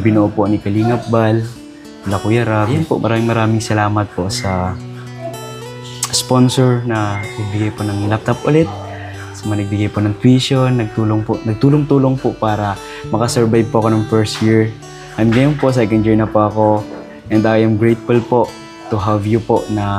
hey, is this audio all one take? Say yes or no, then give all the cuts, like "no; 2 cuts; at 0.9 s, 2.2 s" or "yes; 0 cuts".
no; 1 cut; at 2.7 s